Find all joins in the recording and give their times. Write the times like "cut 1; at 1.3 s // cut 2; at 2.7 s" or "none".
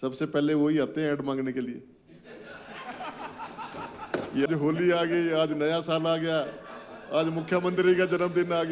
cut 1; at 4.5 s